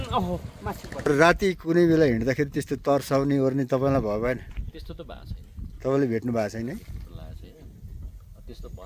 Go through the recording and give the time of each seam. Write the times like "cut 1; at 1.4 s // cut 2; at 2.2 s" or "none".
cut 1; at 1.1 s